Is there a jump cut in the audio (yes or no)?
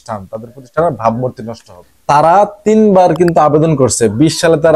yes